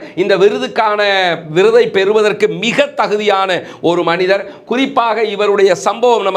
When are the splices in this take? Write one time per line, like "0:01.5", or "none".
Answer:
none